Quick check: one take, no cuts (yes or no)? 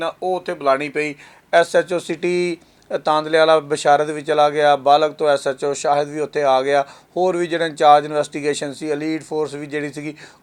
yes